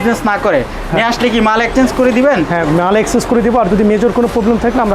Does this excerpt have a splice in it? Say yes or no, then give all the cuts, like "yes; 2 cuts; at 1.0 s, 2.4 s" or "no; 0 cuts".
no; 0 cuts